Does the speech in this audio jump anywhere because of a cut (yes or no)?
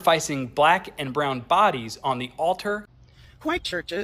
yes